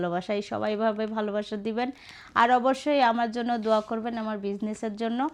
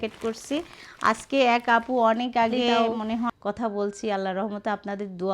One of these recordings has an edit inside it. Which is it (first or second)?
second